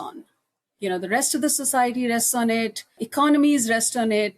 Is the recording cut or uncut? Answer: cut